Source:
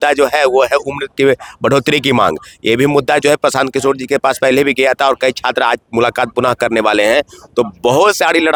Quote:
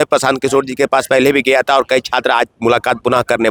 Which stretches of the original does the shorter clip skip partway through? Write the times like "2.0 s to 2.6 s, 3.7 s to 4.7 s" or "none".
none